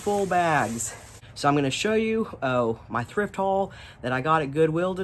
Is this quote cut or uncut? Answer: uncut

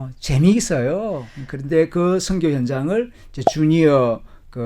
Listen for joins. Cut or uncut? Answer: cut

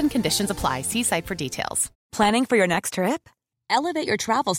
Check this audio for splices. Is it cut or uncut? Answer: cut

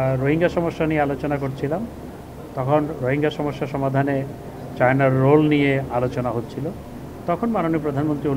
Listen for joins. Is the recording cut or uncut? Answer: uncut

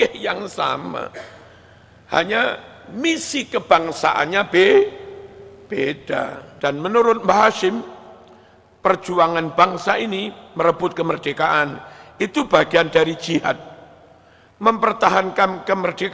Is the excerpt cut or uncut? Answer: cut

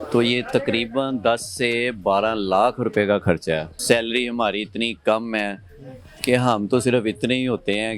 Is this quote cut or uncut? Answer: cut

